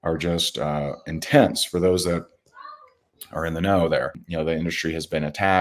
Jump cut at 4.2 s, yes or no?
yes